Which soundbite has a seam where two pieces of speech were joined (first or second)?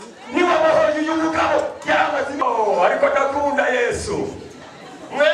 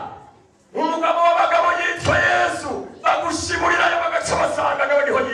first